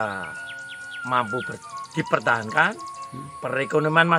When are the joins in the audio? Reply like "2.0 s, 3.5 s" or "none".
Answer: none